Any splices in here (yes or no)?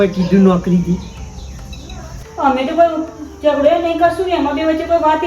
yes